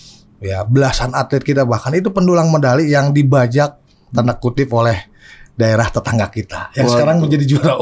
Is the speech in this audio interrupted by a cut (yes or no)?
no